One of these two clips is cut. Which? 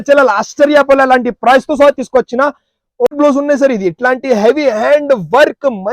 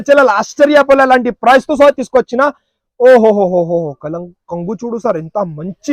first; 1 cut; at 3.1 s

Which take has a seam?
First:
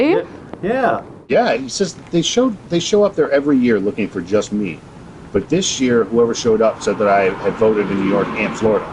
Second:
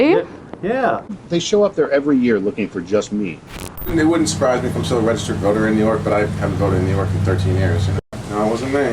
second; 2 cuts; at 1.2 s, 3.7 s

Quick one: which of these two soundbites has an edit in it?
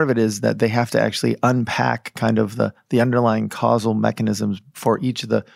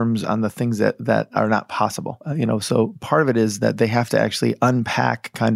second; 1 cut; at 2.3 s

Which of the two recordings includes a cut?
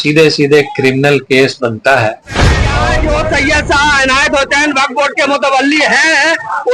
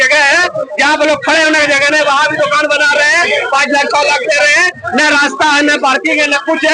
first; 1 cut; at 2.7 s

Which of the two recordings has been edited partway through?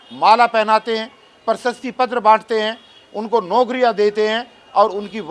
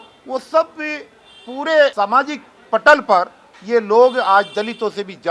second; 1 cut; at 1.9 s

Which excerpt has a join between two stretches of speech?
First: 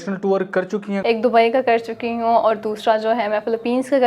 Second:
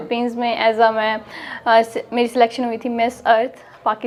first; 1 cut; at 0.9 s

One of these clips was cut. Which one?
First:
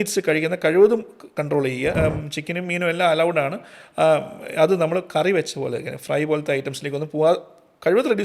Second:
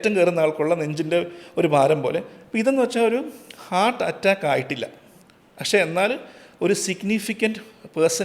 first; 1 cut; at 1.9 s

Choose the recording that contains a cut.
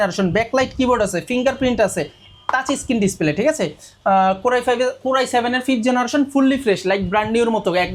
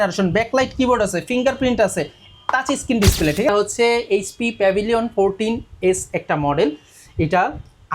second; 1 cut; at 3.5 s

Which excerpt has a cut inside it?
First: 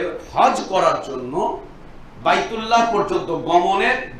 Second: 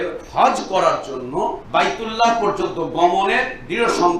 second; 1 cut; at 1.6 s

